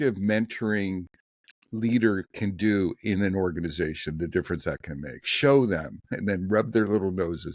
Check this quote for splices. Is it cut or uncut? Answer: uncut